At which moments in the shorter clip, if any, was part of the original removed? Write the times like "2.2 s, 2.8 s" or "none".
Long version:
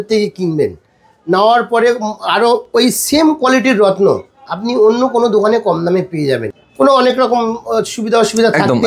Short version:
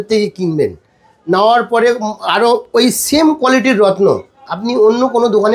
none